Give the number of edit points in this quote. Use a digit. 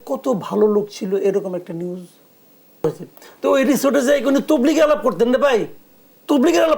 1